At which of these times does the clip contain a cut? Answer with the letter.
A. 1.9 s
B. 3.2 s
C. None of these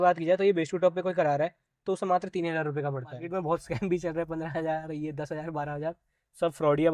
B